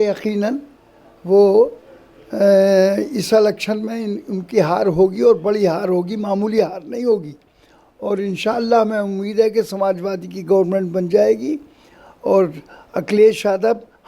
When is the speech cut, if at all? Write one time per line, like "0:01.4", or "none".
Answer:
none